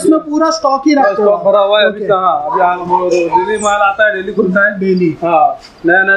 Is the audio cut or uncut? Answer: uncut